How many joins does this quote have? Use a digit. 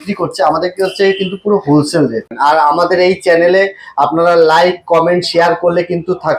1